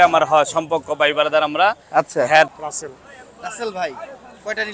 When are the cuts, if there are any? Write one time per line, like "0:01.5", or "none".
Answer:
0:02.5